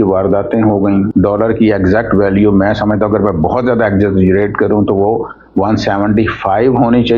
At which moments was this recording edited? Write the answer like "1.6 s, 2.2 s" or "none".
1.1 s